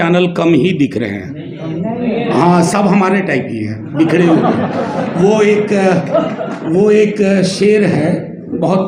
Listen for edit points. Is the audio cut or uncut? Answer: uncut